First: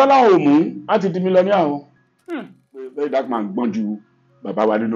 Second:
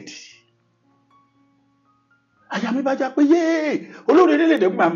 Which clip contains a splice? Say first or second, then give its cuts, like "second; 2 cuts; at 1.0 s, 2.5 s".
first; 1 cut; at 2.9 s